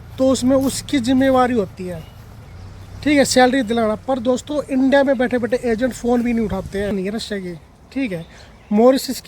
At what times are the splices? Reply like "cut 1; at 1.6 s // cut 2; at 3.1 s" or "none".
cut 1; at 6.9 s